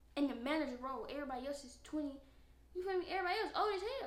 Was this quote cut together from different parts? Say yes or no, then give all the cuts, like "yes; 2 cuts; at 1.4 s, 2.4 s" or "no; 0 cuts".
no; 0 cuts